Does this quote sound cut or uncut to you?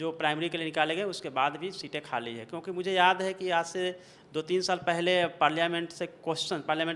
uncut